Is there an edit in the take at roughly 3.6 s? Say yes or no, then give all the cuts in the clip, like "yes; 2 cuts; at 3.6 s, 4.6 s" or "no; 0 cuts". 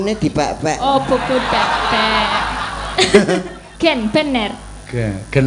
yes; 1 cut; at 3.6 s